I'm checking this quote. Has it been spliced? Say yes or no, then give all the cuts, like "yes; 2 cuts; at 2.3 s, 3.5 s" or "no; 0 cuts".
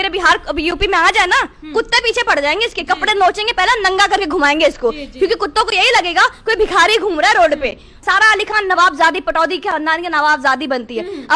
yes; 1 cut; at 8.0 s